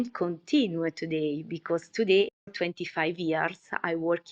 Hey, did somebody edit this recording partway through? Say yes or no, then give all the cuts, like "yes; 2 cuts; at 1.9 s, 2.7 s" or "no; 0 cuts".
yes; 1 cut; at 2.4 s